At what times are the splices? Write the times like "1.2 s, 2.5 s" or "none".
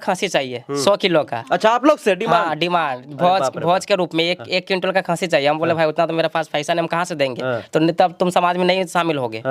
none